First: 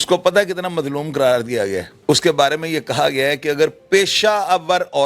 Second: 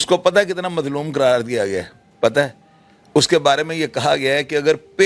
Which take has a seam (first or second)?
first